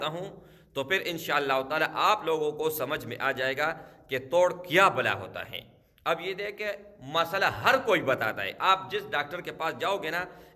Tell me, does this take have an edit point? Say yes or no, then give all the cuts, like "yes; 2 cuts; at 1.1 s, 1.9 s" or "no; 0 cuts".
no; 0 cuts